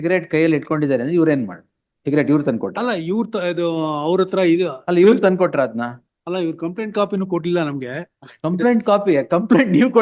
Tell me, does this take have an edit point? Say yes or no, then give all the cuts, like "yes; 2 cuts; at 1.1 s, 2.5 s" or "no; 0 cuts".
no; 0 cuts